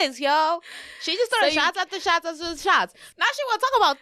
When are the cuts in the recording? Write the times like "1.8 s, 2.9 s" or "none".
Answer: 3.0 s